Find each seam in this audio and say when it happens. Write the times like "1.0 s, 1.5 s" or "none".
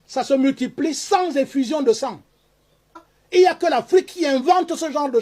3.1 s